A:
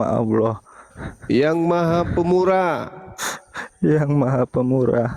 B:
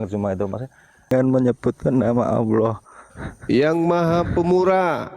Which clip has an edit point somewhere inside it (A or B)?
B